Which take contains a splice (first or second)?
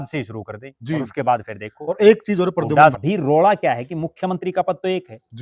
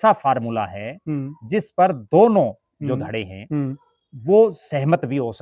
first